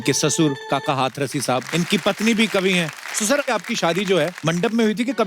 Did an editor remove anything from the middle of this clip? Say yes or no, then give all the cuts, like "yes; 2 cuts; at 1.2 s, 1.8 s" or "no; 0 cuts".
yes; 3 cuts; at 1.6 s, 3.5 s, 4.4 s